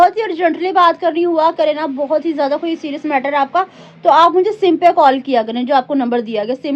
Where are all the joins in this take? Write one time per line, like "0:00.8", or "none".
none